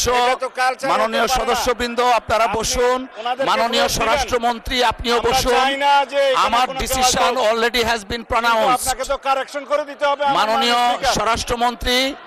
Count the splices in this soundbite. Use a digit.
0